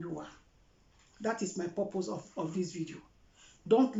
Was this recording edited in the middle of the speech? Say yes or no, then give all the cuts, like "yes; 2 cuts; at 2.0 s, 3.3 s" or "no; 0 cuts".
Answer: no; 0 cuts